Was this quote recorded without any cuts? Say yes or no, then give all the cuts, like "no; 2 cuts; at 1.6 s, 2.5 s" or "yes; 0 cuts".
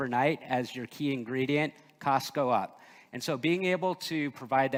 yes; 0 cuts